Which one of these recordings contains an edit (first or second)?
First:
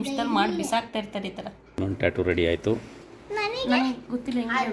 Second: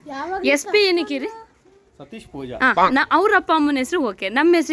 first